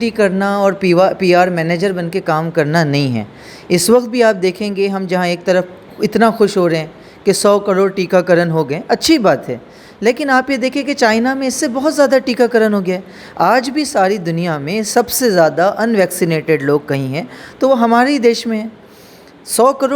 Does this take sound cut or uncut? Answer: uncut